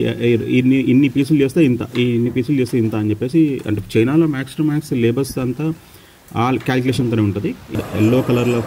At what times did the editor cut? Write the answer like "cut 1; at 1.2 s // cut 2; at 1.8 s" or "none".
cut 1; at 7.7 s